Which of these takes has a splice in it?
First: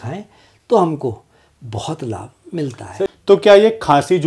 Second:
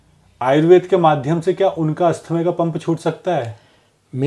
first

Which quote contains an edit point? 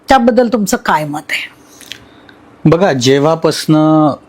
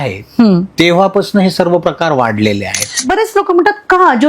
second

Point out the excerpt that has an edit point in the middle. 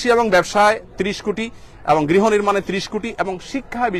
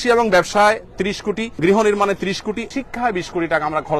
second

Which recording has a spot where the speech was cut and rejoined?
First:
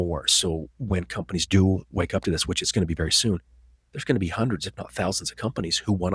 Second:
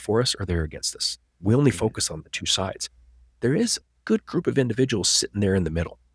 second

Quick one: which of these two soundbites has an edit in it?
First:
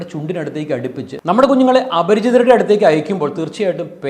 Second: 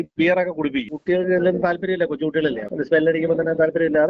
first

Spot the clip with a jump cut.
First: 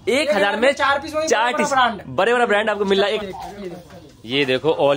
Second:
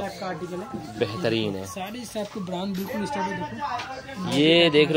first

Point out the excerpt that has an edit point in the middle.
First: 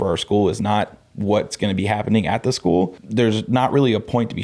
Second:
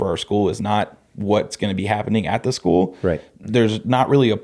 first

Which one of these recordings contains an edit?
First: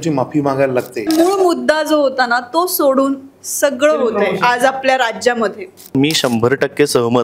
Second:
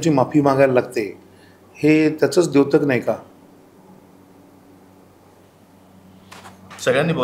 first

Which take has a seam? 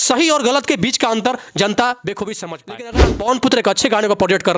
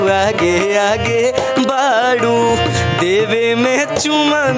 first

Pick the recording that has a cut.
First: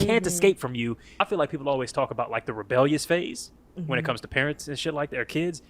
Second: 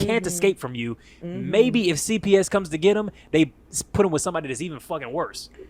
first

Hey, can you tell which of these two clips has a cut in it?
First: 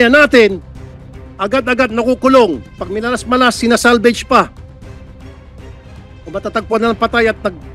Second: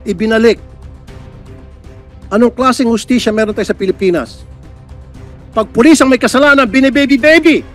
first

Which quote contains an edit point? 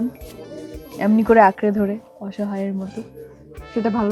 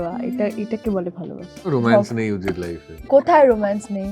second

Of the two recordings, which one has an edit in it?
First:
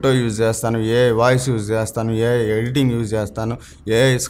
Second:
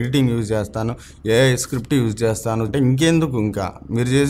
second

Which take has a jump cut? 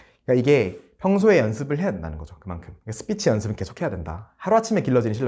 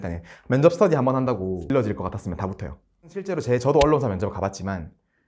second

